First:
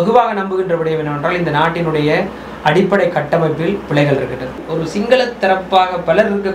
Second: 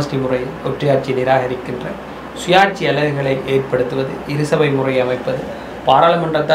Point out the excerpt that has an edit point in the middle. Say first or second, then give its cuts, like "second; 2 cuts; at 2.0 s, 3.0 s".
first; 1 cut; at 4.6 s